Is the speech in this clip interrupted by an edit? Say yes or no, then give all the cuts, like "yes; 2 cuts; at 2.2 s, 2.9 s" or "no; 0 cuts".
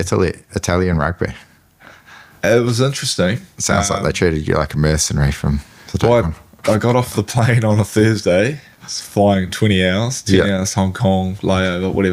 no; 0 cuts